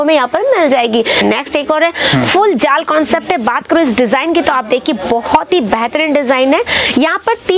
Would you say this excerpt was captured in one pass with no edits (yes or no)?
no